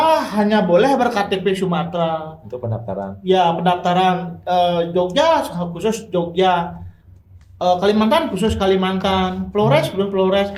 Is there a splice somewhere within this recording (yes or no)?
no